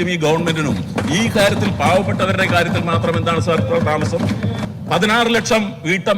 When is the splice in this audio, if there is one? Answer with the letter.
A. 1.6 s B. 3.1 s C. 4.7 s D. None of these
C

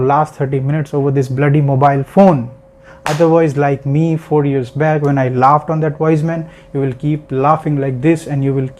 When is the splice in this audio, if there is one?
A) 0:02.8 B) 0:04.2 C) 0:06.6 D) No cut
A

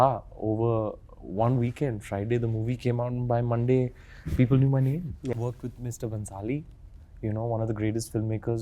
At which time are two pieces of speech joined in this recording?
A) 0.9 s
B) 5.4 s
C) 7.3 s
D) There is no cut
B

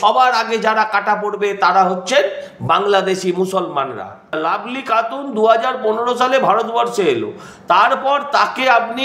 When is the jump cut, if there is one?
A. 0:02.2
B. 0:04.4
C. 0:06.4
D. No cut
B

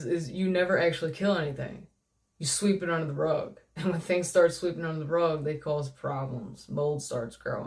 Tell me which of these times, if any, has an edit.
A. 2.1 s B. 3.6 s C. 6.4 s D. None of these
D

